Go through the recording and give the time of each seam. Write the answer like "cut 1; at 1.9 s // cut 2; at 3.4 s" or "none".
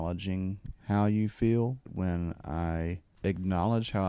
cut 1; at 1.9 s